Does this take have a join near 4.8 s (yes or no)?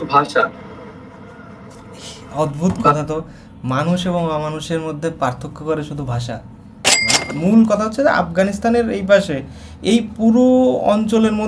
no